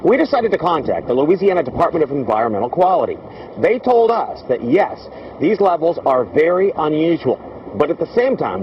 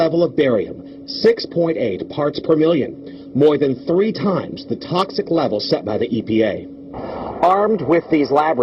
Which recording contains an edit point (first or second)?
first